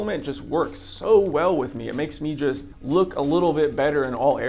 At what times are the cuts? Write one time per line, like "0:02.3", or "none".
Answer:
0:02.7